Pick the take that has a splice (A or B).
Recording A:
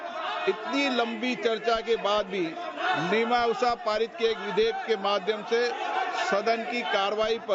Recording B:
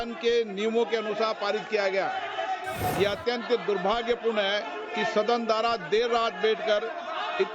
B